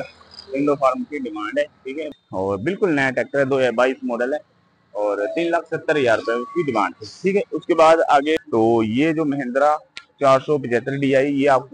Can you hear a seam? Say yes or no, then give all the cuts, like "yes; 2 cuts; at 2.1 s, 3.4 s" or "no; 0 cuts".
yes; 2 cuts; at 2.1 s, 8.4 s